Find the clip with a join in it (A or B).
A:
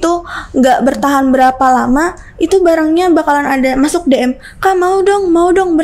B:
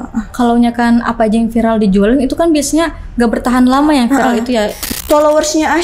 B